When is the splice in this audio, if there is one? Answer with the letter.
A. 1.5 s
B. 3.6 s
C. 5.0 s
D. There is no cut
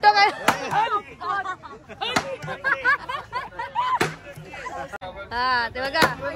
C